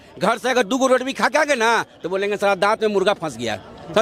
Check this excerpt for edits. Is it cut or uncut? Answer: uncut